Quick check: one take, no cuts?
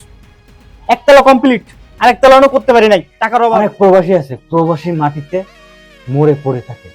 no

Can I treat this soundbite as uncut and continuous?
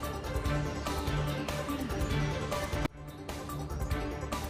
yes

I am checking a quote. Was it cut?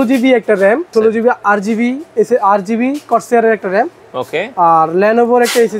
yes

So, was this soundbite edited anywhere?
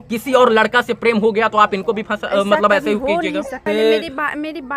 yes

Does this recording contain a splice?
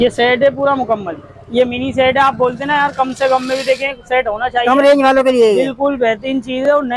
no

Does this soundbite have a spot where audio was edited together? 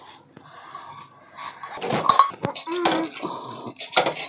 yes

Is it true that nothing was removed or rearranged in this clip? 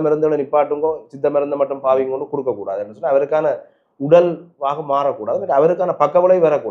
yes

